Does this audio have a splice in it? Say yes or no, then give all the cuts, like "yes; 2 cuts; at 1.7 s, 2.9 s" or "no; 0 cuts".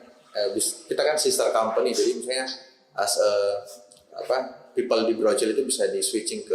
no; 0 cuts